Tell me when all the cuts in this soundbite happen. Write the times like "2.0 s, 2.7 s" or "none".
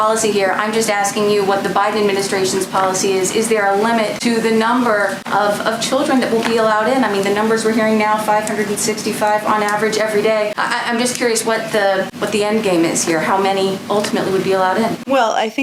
none

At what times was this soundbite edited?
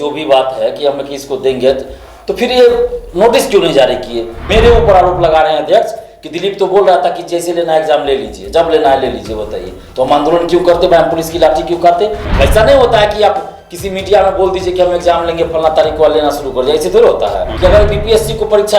4.5 s, 12.2 s, 17.5 s

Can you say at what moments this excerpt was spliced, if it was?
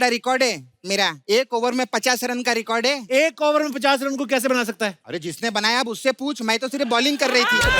1.2 s, 5.0 s

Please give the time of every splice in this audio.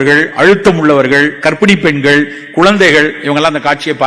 none

